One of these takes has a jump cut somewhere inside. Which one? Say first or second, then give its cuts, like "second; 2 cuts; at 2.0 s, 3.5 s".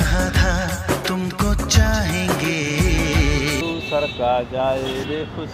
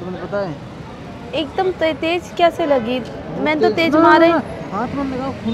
first; 1 cut; at 3.6 s